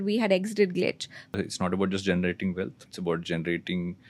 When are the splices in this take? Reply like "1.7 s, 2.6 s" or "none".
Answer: 1.3 s, 2.8 s